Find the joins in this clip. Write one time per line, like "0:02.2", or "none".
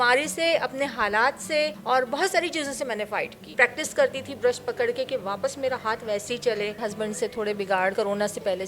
0:01.8
0:03.5
0:06.8
0:07.9